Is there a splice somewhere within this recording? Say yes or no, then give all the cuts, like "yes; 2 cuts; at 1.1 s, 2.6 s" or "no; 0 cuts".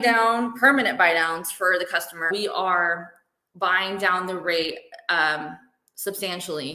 yes; 1 cut; at 2.3 s